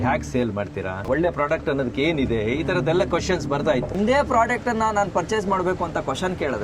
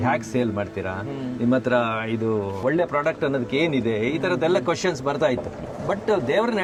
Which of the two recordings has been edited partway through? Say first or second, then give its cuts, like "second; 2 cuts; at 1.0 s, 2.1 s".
first; 2 cuts; at 1.0 s, 3.9 s